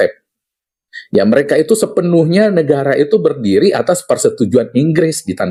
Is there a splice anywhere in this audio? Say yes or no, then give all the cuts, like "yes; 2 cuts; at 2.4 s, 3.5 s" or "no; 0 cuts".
no; 0 cuts